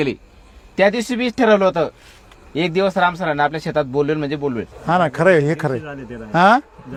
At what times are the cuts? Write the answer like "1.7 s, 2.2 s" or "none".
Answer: none